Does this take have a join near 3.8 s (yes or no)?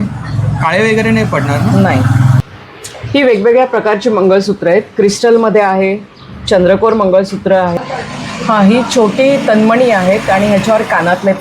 no